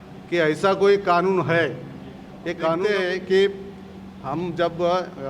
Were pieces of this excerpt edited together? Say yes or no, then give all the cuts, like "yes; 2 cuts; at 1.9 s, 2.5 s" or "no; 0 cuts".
yes; 1 cut; at 2.8 s